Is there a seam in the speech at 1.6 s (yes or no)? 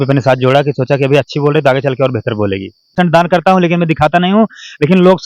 no